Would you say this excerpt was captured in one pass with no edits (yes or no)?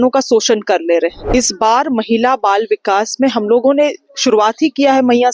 no